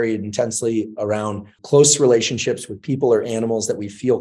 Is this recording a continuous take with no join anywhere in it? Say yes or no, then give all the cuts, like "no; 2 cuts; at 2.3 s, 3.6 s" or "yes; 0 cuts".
no; 1 cut; at 1.5 s